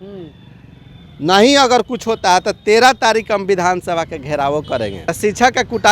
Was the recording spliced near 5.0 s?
yes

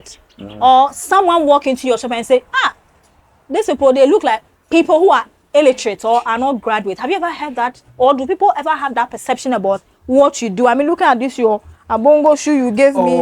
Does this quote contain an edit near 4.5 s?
yes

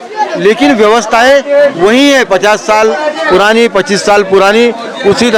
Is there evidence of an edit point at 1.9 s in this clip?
no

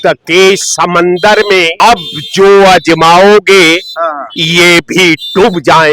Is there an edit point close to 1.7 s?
yes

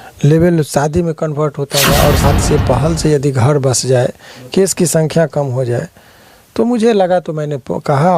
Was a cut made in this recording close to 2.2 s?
yes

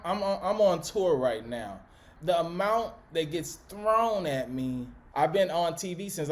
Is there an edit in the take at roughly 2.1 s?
yes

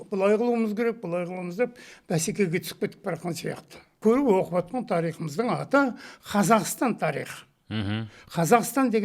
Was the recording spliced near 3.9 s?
yes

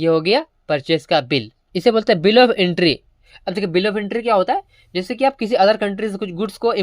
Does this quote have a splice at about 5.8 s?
no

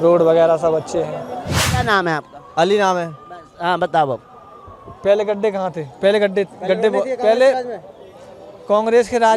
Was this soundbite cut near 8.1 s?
no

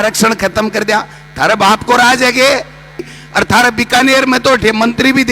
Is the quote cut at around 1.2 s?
no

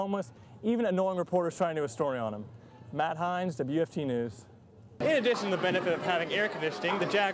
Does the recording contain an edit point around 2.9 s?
no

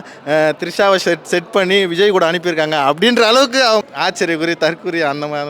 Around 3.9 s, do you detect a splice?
yes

